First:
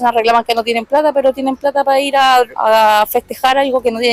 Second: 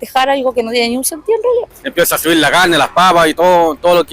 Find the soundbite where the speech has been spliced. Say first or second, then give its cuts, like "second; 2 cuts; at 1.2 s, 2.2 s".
second; 1 cut; at 1.8 s